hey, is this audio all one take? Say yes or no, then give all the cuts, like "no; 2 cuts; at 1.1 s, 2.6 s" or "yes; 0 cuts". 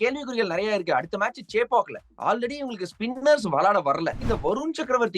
no; 1 cut; at 4.2 s